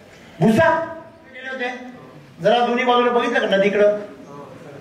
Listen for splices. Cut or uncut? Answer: cut